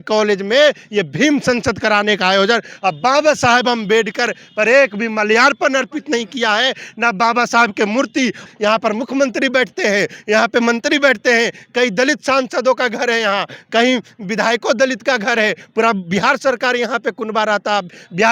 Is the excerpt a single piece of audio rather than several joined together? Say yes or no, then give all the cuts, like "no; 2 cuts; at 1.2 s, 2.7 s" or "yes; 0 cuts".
no; 1 cut; at 8.4 s